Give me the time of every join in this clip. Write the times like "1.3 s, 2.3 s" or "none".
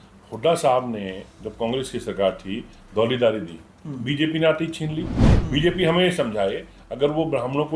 5.3 s